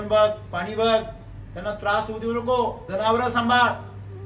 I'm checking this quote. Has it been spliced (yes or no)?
yes